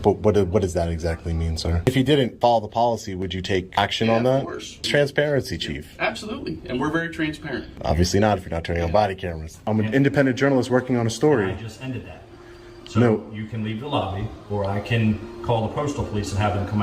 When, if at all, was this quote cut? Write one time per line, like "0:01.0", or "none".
0:02.0
0:03.8
0:04.8
0:07.7
0:09.6